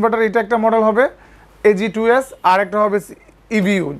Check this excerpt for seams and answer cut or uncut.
uncut